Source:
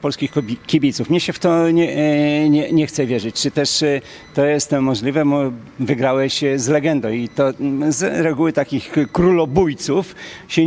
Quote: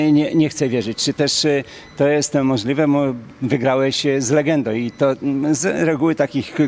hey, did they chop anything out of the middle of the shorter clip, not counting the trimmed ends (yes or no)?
no